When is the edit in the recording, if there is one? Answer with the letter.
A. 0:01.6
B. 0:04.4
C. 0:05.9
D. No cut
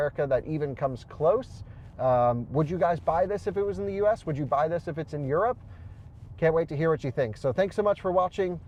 D